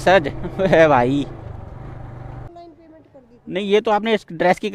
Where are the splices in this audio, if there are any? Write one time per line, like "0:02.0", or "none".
0:02.5